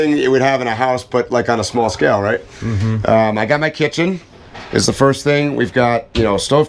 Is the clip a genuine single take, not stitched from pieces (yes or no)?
yes